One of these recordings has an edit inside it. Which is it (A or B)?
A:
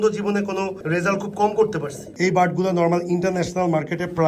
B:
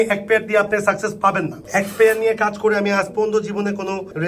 A